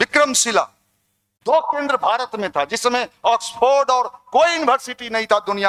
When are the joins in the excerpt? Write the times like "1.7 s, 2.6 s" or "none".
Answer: none